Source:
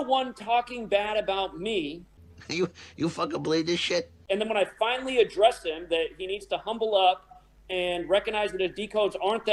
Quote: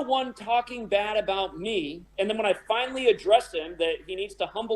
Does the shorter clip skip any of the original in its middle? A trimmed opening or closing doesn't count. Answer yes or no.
yes